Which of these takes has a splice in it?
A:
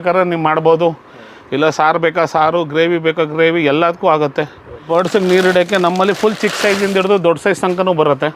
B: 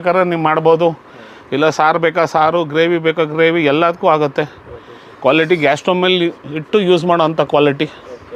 A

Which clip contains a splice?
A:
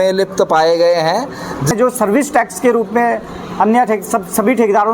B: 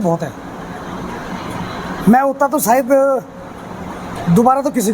A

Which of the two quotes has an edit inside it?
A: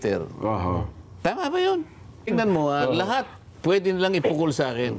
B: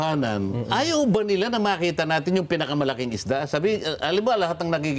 A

